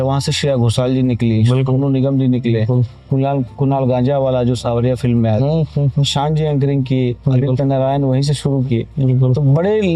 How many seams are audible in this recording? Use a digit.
0